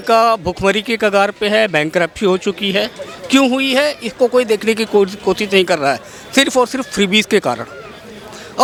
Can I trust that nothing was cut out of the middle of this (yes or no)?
yes